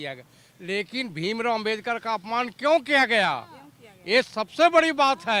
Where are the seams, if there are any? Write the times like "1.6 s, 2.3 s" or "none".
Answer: none